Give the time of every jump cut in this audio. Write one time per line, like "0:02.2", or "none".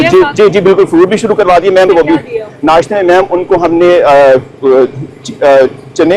0:01.9